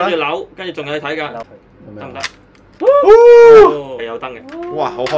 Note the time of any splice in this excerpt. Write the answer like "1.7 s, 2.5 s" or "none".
1.5 s, 4.0 s